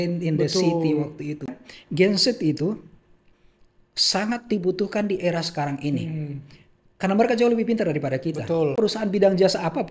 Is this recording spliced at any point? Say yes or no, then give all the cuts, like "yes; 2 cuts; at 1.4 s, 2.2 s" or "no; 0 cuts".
yes; 2 cuts; at 1.5 s, 8.7 s